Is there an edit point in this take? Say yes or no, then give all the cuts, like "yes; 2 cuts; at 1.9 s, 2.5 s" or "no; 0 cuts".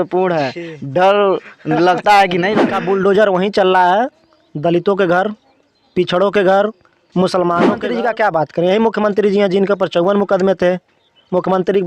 yes; 2 cuts; at 2.7 s, 7.8 s